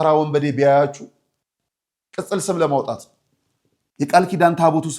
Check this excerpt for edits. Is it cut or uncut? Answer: uncut